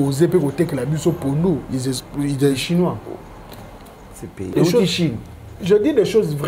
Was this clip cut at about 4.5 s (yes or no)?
yes